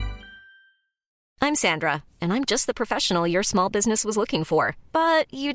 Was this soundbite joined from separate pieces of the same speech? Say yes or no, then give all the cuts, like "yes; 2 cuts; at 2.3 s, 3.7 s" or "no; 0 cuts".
yes; 1 cut; at 1.2 s